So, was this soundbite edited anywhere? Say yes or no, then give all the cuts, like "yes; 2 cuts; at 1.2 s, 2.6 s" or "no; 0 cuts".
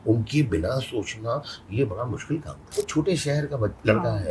yes; 1 cut; at 2.6 s